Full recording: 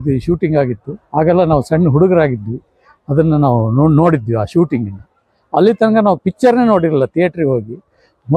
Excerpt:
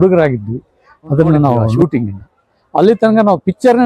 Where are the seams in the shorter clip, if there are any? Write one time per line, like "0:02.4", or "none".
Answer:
0:01.7

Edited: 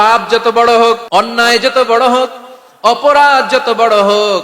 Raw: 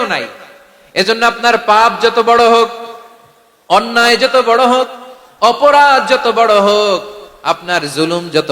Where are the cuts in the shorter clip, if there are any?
0:01.0

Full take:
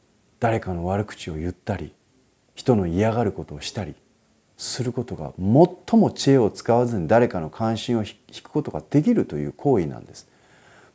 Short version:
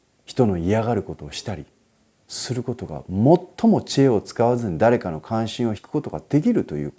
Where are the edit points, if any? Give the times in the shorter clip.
0:05.8

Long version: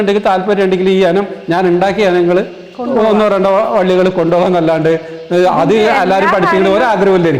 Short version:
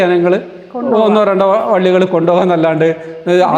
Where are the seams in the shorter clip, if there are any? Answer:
none

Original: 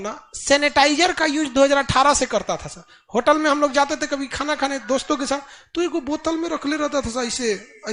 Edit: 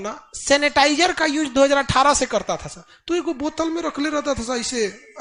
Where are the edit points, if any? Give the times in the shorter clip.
0:02.9

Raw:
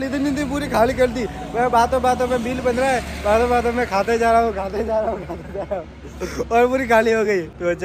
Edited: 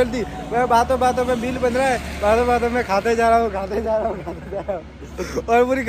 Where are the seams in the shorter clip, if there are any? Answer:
none

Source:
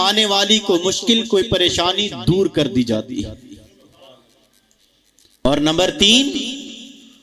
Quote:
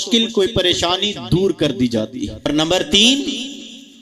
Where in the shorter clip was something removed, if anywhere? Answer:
0:02.5

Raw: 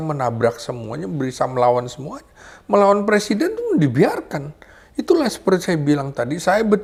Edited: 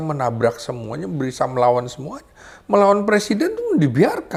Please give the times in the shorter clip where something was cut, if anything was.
none

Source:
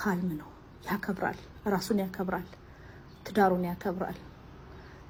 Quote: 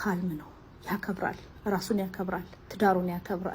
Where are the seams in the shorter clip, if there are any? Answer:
0:02.6

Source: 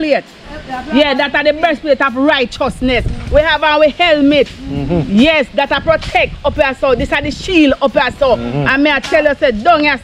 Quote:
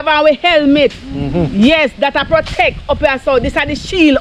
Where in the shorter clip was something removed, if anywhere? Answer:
none

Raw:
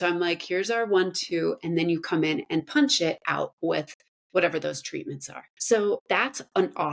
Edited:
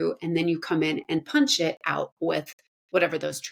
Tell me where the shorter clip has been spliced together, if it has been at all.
none

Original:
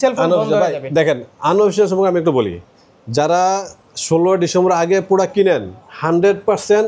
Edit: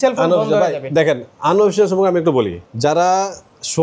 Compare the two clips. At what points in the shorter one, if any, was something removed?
0:02.6

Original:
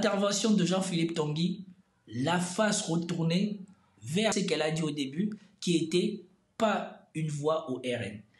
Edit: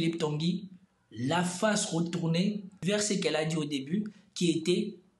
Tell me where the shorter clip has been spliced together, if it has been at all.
0:03.1

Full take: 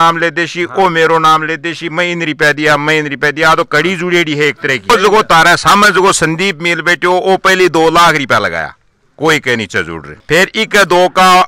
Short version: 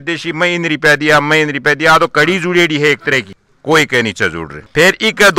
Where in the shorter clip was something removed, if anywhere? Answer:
0:03.2

